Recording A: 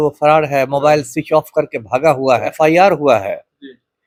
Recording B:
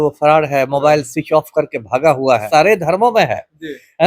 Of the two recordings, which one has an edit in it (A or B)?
B